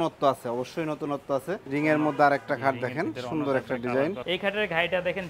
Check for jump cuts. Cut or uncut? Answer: cut